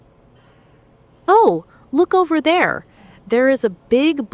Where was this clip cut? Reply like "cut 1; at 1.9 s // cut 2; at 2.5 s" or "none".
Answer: cut 1; at 1.1 s